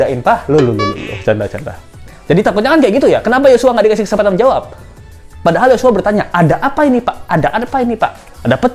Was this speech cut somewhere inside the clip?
no; 0 cuts

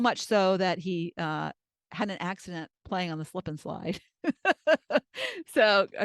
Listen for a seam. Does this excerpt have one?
yes; 1 cut; at 2.8 s

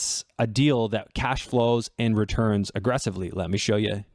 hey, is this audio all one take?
yes; 0 cuts

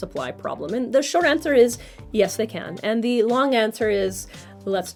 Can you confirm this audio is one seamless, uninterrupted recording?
yes; 0 cuts

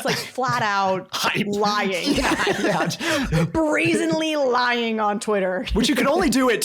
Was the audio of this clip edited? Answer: yes; 1 cut; at 5.7 s

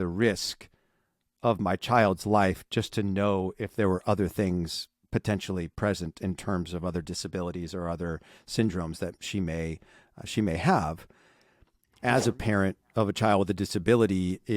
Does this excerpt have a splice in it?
yes; 1 cut; at 11.3 s

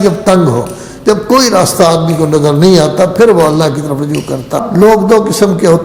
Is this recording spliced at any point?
yes; 1 cut; at 4.6 s

